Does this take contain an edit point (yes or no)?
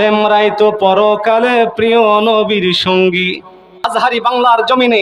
yes